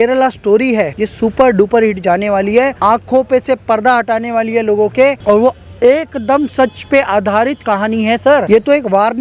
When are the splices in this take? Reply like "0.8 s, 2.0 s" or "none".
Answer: 1.0 s, 2.7 s, 5.2 s, 8.4 s